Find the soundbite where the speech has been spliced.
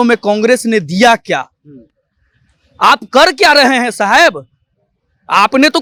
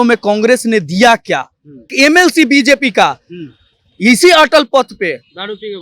second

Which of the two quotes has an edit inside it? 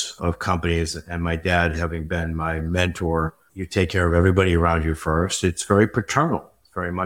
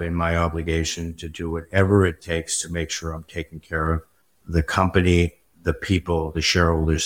first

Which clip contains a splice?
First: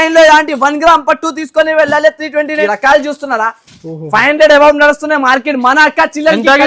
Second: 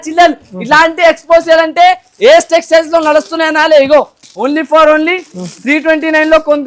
first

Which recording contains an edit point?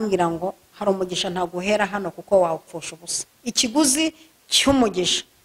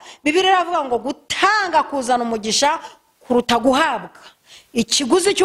first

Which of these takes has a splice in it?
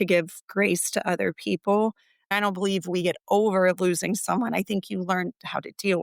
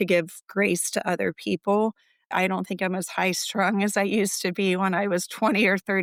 first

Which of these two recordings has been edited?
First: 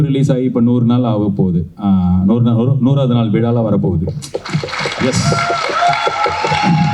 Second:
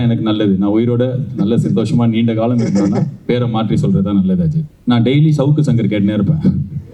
second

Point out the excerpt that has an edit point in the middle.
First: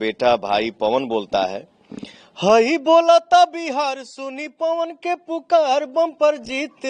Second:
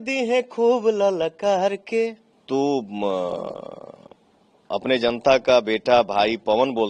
second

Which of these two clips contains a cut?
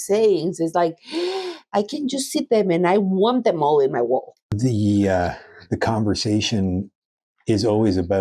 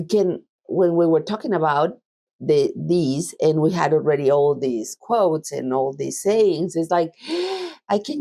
first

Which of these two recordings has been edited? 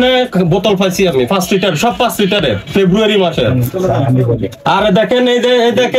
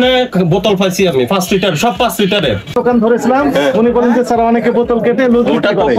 second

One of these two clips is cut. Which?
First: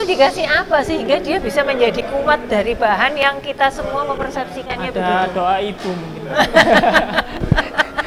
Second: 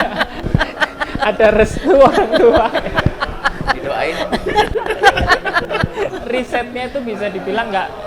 second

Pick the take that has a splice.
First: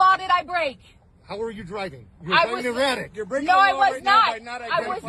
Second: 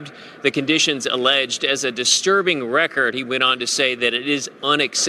first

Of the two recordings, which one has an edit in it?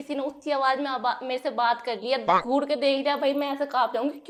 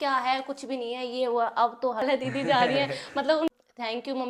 second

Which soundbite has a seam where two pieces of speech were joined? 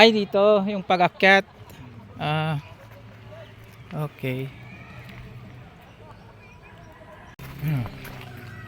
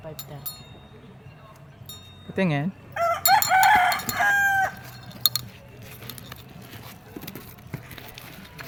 first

